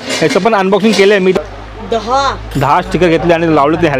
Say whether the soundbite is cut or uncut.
cut